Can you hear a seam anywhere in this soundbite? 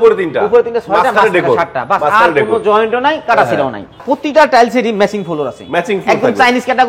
yes; 1 cut; at 4.0 s

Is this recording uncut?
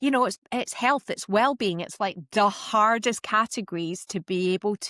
yes; 0 cuts

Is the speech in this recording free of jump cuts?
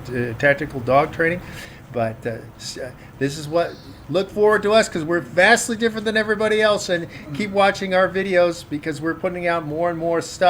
yes; 0 cuts

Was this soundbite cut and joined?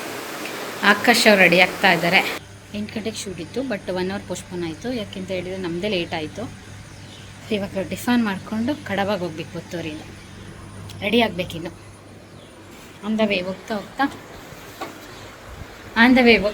no; 0 cuts

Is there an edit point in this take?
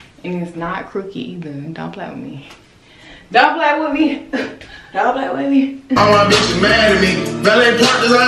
yes; 1 cut; at 6.0 s

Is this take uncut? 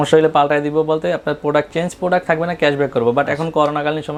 yes; 0 cuts

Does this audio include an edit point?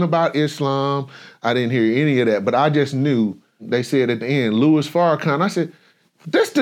yes; 1 cut; at 3.6 s

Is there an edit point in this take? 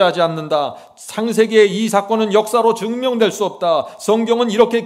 no; 0 cuts

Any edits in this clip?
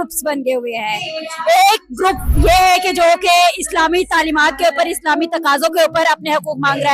no; 0 cuts

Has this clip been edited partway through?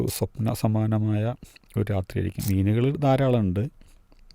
yes; 1 cut; at 2.3 s

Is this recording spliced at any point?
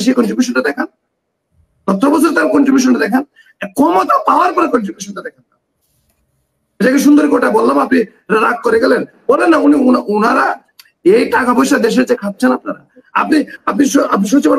no; 0 cuts

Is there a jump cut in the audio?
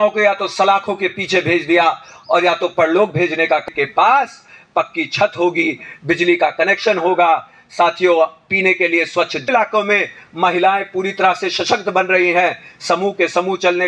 yes; 2 cuts; at 3.6 s, 9.4 s

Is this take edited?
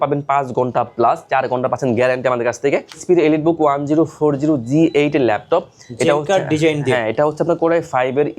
yes; 1 cut; at 3.0 s

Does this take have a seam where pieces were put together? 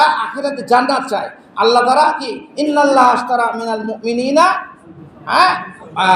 no; 0 cuts

